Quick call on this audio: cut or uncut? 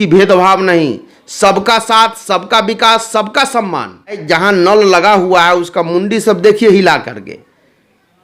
cut